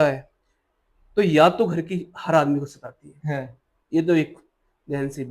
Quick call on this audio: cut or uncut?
uncut